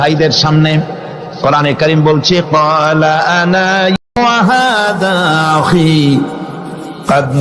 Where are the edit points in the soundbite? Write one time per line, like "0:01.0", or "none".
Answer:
0:04.1